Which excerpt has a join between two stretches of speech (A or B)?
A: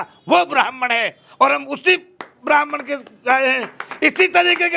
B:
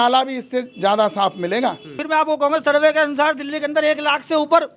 B